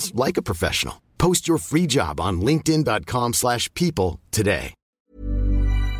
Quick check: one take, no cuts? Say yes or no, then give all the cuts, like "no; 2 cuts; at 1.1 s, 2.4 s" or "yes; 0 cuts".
no; 1 cut; at 4.8 s